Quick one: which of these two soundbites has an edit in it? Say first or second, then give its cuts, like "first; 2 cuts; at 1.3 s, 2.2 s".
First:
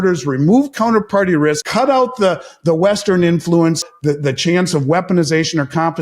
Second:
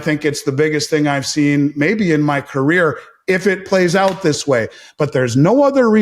first; 2 cuts; at 1.6 s, 3.9 s